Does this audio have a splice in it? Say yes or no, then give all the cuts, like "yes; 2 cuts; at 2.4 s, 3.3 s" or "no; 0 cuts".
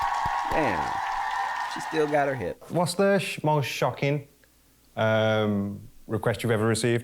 yes; 1 cut; at 2.6 s